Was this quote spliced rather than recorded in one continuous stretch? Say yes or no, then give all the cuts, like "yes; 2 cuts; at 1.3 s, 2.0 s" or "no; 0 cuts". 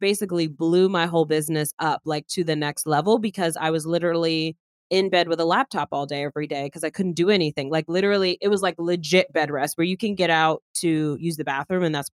no; 0 cuts